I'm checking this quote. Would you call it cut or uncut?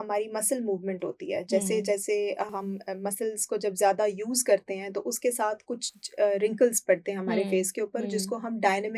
uncut